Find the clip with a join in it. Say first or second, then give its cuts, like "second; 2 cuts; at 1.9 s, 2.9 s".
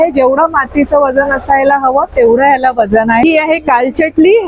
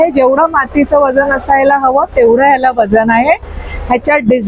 first; 1 cut; at 3.2 s